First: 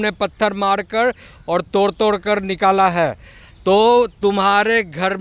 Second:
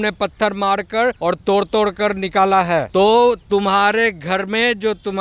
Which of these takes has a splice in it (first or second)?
second